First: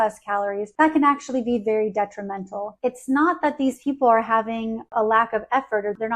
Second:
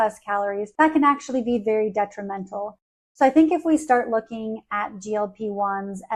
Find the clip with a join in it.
first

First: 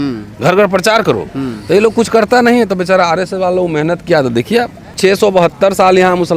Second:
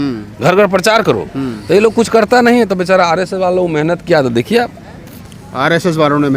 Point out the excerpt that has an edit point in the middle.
first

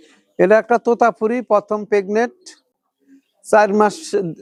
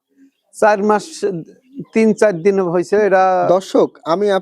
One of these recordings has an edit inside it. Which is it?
second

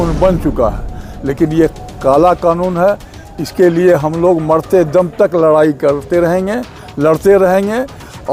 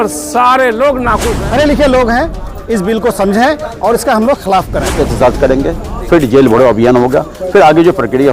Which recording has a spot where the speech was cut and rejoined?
second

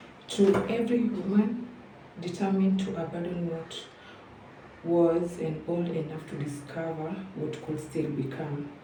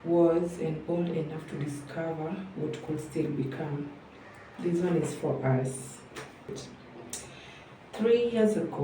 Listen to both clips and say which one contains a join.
second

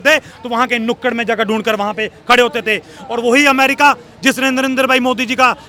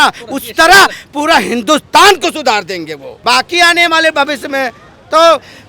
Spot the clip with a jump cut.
second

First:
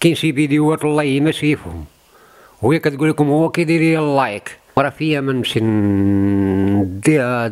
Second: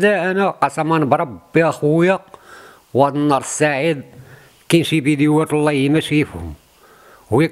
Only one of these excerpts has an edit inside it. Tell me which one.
first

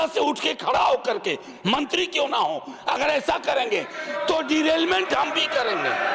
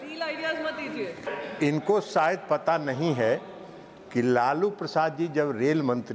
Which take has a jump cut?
second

